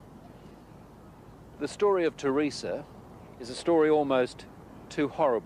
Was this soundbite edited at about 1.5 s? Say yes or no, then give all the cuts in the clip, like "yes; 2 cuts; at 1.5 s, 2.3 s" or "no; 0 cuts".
yes; 1 cut; at 1.5 s